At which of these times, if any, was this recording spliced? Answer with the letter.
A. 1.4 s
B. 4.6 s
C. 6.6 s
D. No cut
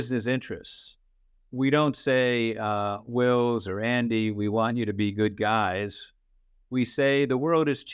D